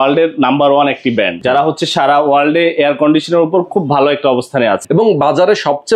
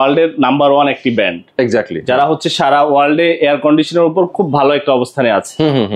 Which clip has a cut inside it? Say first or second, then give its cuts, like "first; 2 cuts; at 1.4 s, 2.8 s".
first; 2 cuts; at 1.4 s, 4.8 s